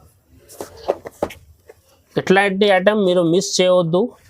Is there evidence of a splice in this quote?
no; 0 cuts

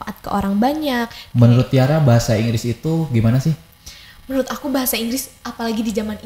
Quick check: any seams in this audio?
yes; 1 cut; at 1.2 s

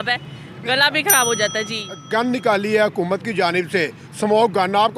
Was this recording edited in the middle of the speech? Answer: yes; 1 cut; at 1.9 s

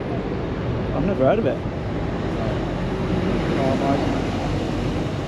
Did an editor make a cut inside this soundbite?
no; 0 cuts

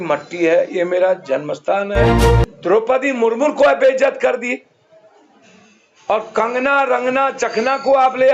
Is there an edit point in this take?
yes; 1 cut; at 2.3 s

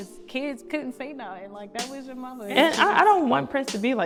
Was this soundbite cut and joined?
no; 0 cuts

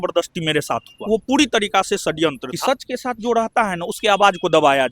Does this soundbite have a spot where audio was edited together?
yes; 2 cuts; at 1.0 s, 2.5 s

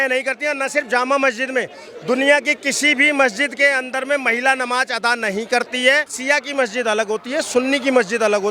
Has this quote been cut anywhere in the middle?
yes; 1 cut; at 6.1 s

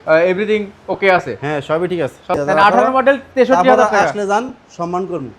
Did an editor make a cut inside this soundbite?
yes; 1 cut; at 2.2 s

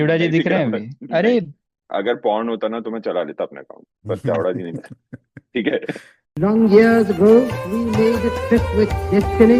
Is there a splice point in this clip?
yes; 1 cut; at 6.2 s

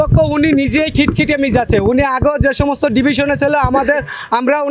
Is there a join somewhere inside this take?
no; 0 cuts

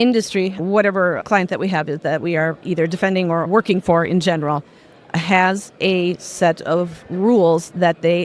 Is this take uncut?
no; 2 cuts; at 1.2 s, 2.6 s

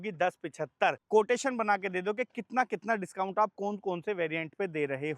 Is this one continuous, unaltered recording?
no; 1 cut; at 1.0 s

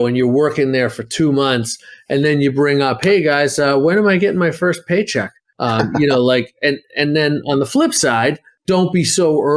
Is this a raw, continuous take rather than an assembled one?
yes; 0 cuts

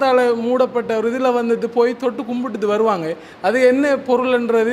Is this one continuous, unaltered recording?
yes; 0 cuts

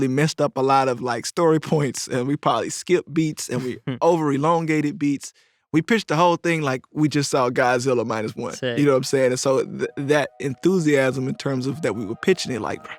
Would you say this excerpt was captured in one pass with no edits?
yes; 0 cuts

